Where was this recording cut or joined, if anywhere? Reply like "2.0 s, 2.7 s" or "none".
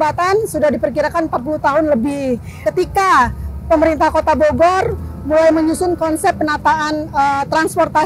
2.6 s